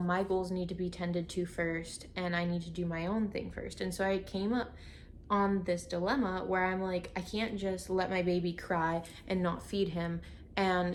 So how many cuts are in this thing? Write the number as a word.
zero